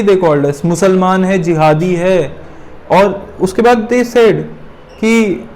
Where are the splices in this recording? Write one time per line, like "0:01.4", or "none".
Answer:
none